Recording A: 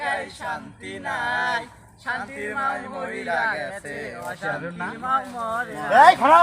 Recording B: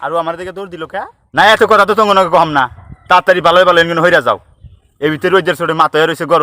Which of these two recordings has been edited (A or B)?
B